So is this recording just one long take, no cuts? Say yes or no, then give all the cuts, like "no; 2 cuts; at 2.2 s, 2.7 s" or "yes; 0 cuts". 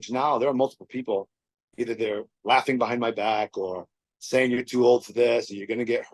yes; 0 cuts